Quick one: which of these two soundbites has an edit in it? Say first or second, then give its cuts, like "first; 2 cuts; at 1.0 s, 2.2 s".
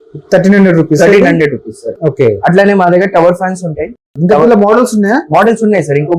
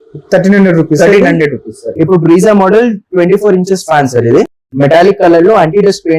second; 1 cut; at 1.9 s